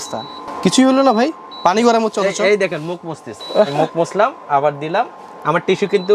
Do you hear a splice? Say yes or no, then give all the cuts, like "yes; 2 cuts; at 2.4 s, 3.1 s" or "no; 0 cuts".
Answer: no; 0 cuts